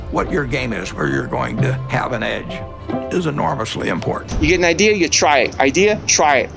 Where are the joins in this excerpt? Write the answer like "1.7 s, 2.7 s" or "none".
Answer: 4.3 s